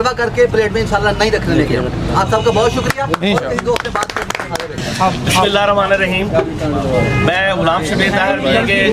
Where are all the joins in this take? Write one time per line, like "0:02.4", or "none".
none